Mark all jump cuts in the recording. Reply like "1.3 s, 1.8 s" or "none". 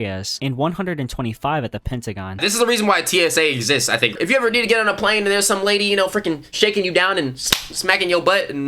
2.4 s, 4.1 s

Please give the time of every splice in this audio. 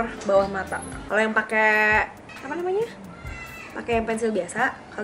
0.9 s

